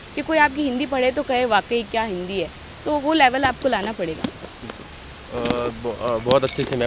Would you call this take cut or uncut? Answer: uncut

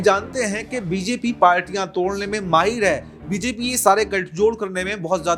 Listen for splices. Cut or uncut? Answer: uncut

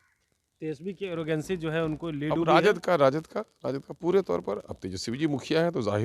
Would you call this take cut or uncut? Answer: uncut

